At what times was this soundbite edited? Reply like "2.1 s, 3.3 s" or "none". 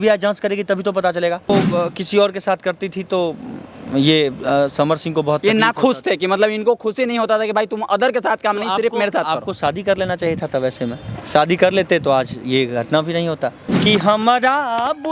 1.5 s, 13.7 s